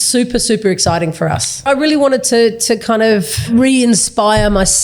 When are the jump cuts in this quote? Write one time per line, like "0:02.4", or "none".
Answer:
0:01.7
0:03.4